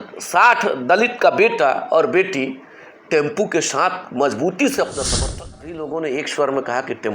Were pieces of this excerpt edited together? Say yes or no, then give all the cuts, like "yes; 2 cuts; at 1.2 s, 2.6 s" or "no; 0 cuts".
yes; 1 cut; at 5.1 s